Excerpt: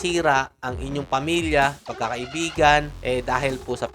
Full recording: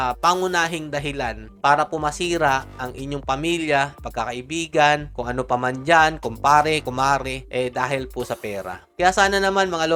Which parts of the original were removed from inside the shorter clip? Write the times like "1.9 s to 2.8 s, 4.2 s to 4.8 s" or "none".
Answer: 5.1 s to 7.4 s